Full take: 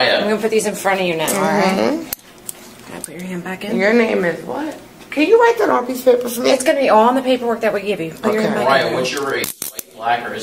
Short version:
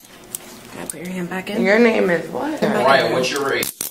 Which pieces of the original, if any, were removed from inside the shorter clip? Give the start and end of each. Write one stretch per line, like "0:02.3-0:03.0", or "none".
0:04.8-0:08.4